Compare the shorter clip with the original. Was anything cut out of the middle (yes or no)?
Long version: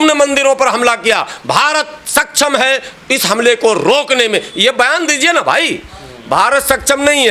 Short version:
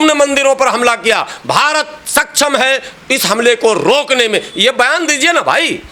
no